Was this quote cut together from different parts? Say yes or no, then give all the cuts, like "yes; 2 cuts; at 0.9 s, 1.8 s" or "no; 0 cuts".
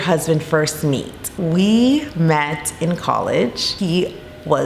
yes; 2 cuts; at 1.3 s, 3.6 s